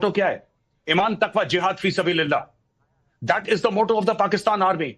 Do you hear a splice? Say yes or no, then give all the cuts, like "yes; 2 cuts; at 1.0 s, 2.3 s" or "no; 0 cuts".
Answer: no; 0 cuts